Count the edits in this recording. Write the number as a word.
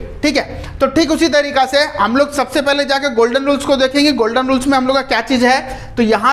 zero